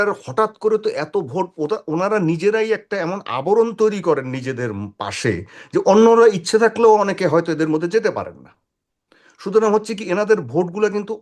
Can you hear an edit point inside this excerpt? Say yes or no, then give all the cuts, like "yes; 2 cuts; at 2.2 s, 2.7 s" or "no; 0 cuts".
no; 0 cuts